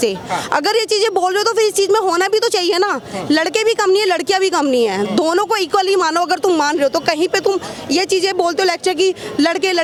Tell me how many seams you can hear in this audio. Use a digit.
0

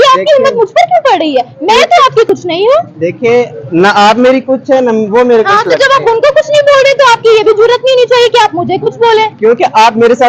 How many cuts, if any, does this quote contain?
0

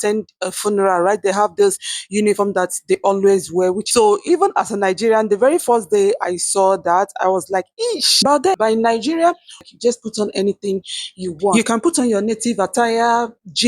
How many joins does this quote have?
3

